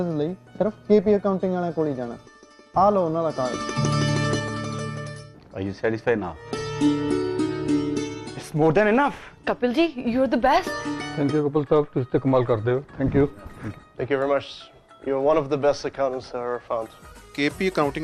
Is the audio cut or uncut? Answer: uncut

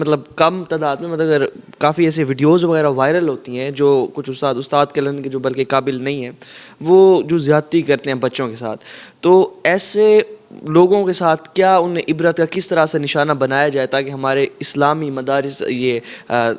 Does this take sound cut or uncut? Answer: uncut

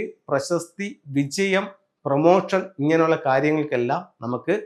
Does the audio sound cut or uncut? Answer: uncut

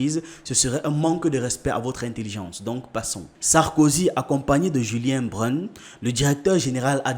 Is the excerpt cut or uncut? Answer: cut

